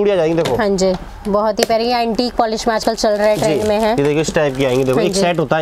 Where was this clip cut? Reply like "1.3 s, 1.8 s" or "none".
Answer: 1.1 s